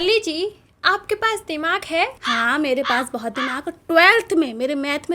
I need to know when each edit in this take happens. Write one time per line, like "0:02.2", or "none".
0:02.2